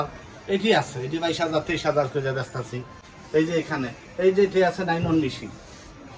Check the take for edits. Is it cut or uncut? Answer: uncut